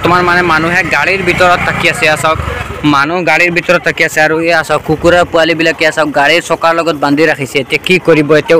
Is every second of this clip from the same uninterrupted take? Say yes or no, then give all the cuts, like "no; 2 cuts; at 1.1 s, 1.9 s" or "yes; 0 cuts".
yes; 0 cuts